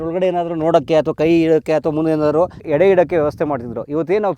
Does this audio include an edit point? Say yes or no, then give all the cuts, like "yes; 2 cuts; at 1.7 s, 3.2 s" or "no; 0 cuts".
yes; 1 cut; at 2.6 s